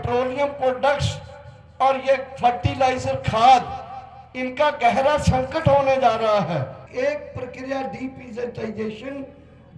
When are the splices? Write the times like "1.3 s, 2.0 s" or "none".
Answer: 6.8 s